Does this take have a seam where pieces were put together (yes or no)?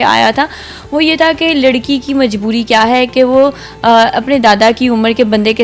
no